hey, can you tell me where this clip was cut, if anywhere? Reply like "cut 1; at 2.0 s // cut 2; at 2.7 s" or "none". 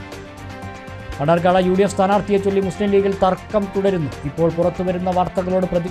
cut 1; at 1.0 s